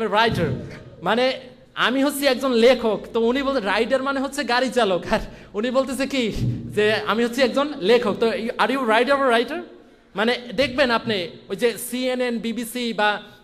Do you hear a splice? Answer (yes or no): no